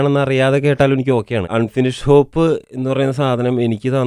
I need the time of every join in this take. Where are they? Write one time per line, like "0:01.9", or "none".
0:01.5
0:02.7